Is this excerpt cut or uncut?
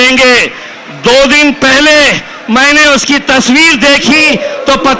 uncut